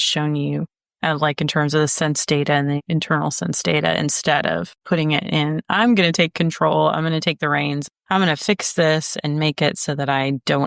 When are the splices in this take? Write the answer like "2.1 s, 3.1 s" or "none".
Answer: none